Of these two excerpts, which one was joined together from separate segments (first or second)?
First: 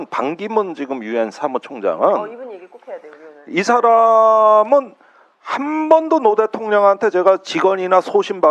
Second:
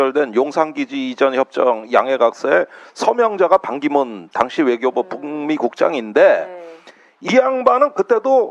second